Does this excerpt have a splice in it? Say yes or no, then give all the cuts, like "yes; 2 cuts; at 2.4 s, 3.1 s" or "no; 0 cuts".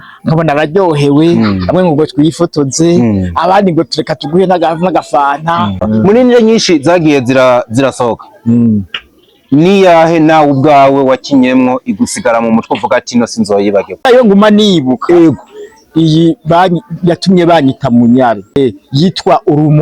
yes; 3 cuts; at 5.8 s, 14.0 s, 18.6 s